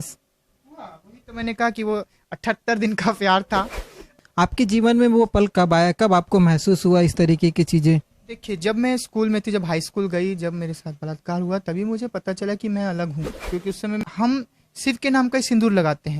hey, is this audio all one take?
no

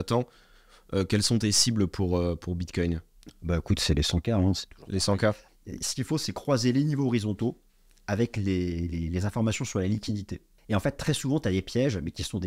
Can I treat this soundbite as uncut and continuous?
no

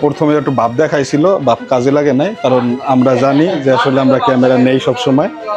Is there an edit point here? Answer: no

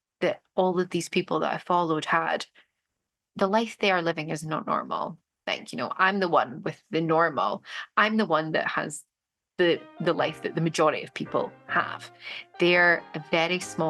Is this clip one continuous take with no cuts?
no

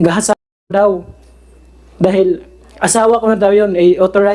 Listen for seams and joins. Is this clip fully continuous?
yes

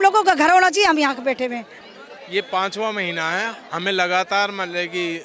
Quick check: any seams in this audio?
yes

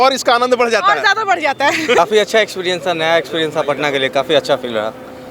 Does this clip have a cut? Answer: yes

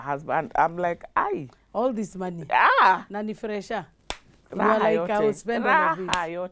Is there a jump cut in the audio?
no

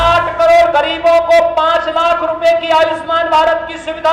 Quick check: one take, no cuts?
yes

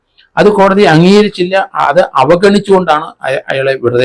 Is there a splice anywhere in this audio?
no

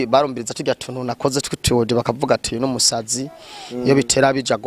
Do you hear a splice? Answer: no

